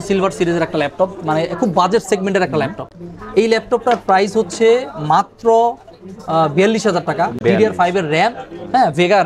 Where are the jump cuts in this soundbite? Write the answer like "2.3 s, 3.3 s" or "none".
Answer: none